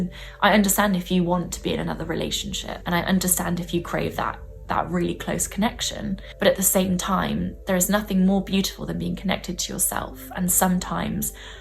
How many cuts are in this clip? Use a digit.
2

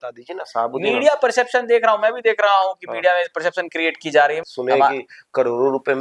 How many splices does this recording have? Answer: 1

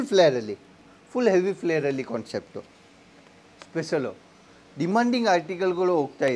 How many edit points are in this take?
0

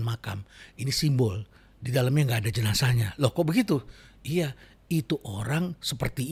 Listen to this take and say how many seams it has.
0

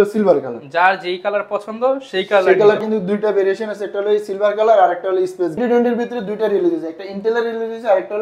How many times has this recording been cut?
2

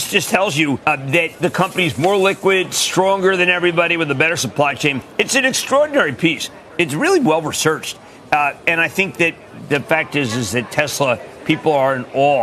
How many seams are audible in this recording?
0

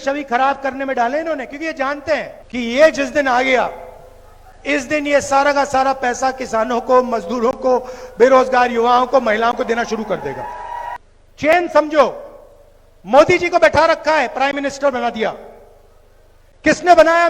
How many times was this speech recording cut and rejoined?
2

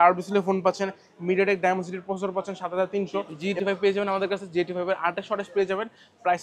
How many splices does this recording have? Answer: 1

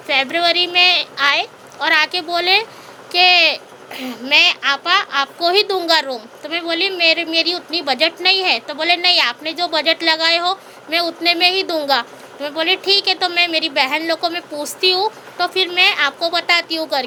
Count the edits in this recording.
0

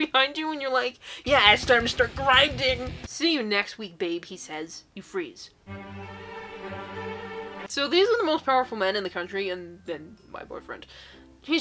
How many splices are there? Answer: 2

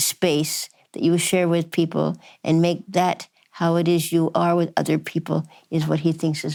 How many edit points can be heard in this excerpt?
0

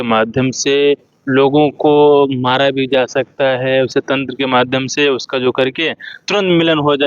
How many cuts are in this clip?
1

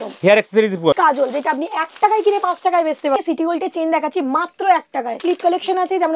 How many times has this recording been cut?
3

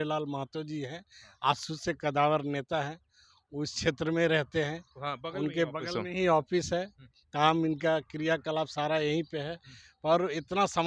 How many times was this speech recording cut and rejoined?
0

